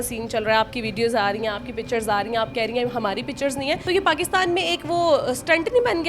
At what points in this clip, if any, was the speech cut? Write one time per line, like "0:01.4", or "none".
0:03.8